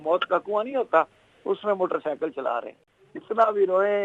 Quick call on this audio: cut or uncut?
cut